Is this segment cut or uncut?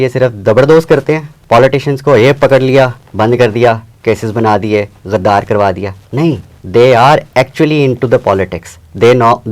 cut